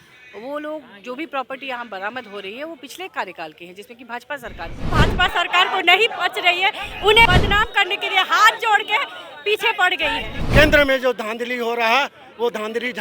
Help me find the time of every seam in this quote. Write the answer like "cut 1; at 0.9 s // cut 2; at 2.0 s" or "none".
cut 1; at 4.9 s // cut 2; at 7.3 s // cut 3; at 10.5 s

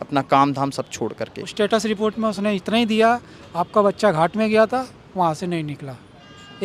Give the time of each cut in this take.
cut 1; at 1.5 s

